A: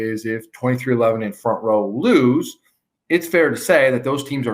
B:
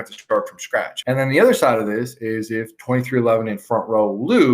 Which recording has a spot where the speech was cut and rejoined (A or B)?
B